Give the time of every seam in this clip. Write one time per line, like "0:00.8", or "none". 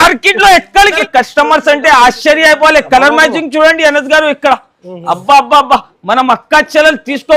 0:01.0